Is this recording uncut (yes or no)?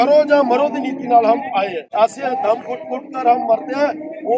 no